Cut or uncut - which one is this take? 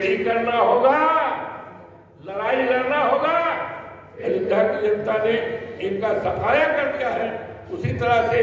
cut